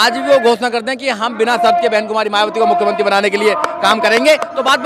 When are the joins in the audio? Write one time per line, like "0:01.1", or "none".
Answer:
none

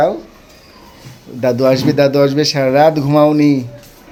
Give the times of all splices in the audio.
none

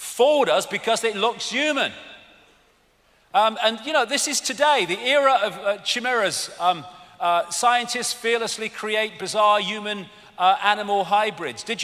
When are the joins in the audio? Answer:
none

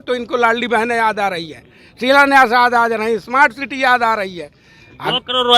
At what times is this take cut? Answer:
none

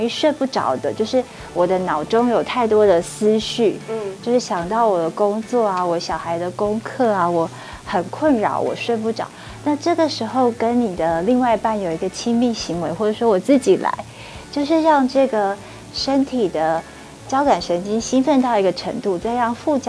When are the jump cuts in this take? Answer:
none

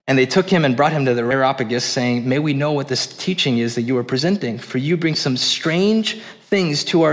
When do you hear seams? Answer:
0:01.3

